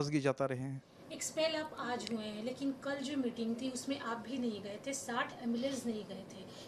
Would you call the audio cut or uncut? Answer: uncut